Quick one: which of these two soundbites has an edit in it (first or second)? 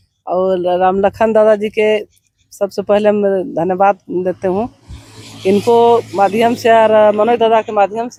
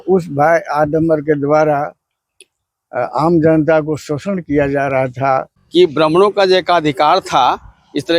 second